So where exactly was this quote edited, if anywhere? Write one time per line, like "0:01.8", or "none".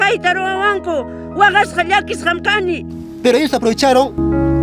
0:02.9